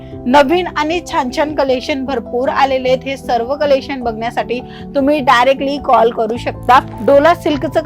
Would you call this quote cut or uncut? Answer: cut